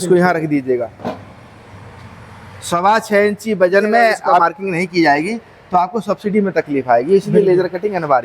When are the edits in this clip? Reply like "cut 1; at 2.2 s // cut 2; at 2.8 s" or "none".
cut 1; at 4.4 s

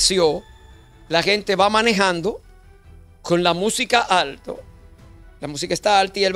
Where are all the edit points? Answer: none

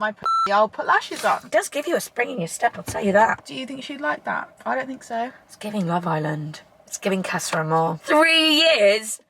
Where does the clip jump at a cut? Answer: cut 1; at 1.4 s // cut 2; at 3.4 s // cut 3; at 4.5 s // cut 4; at 8.0 s

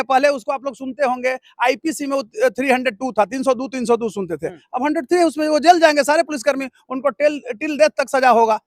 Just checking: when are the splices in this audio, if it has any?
none

